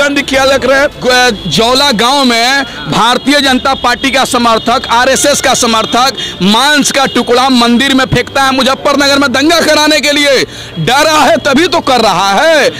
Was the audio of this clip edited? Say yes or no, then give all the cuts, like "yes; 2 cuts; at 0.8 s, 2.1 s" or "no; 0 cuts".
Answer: yes; 1 cut; at 1.0 s